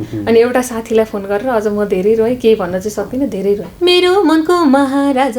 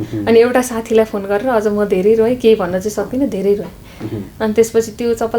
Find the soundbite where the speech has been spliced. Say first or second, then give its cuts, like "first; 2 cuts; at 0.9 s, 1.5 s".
first; 1 cut; at 3.7 s